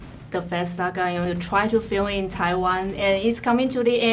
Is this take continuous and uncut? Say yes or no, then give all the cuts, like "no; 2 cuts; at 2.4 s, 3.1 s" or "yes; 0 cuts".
no; 1 cut; at 2.9 s